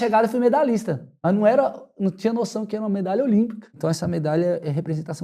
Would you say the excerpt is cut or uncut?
cut